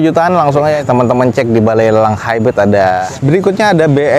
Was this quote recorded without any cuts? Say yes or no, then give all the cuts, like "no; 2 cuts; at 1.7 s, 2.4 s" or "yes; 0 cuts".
no; 1 cut; at 3.0 s